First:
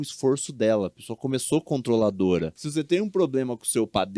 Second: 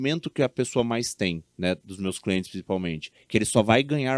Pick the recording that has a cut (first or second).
first